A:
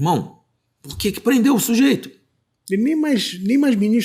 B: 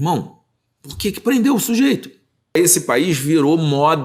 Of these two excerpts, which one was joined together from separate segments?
B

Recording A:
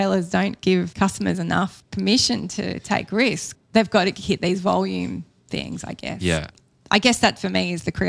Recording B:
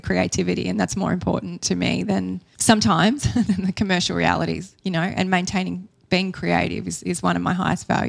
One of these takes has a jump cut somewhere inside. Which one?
A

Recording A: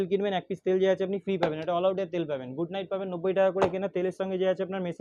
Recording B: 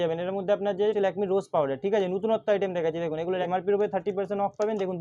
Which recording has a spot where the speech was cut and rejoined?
B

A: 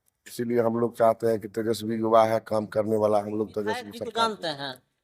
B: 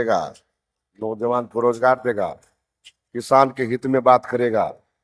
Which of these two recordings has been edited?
A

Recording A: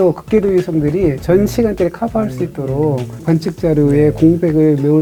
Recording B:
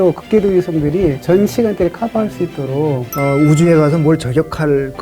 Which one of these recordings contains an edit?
B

